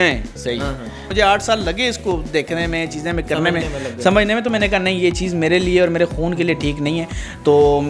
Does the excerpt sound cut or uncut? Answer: uncut